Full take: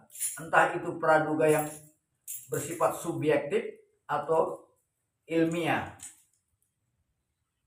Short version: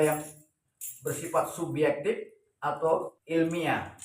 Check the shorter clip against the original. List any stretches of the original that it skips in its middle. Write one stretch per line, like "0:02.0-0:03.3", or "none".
0:04.6-0:05.2